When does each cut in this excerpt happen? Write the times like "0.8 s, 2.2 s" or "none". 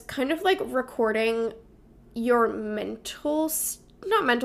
none

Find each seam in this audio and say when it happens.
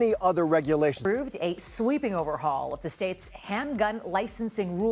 1.0 s

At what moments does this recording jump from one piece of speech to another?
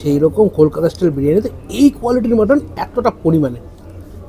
none

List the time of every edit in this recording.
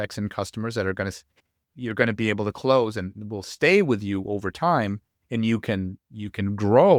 none

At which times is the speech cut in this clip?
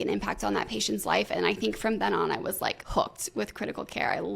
2.8 s

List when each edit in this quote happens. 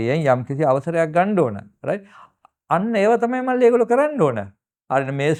none

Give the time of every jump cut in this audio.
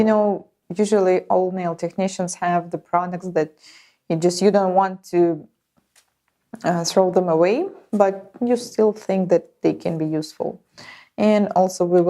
1.8 s

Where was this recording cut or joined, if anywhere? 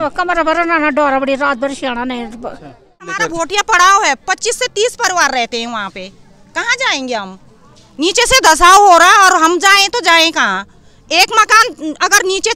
3.2 s

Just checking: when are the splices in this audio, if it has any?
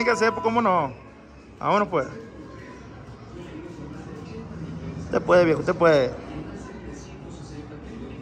none

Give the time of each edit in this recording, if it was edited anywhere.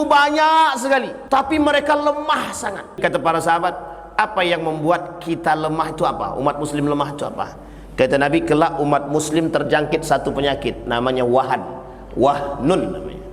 1.1 s, 3.0 s

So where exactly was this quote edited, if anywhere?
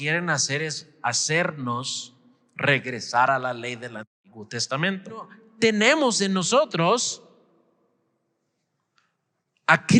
5.4 s

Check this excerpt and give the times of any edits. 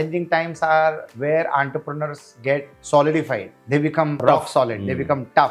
2.7 s, 4.2 s

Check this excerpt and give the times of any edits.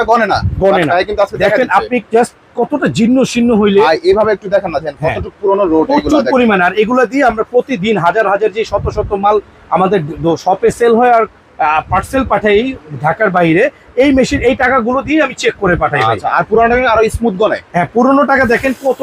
none

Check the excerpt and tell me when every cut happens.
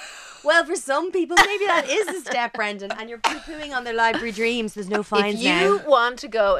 none

